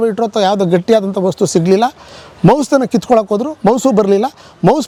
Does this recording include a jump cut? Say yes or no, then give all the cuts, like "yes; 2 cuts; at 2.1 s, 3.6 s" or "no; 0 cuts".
no; 0 cuts